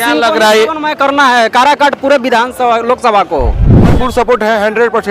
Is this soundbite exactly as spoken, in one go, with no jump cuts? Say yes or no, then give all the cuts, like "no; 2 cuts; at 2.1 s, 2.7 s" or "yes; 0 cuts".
no; 1 cut; at 4.0 s